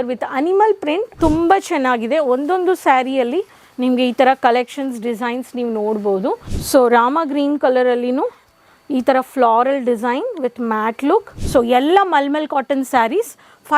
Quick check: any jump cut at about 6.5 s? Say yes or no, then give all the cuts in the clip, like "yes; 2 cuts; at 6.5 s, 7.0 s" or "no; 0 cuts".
yes; 3 cuts; at 1.1 s, 6.5 s, 11.4 s